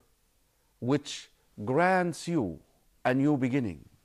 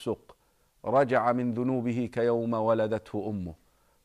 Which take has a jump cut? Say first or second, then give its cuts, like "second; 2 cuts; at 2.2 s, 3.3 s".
second; 1 cut; at 1.1 s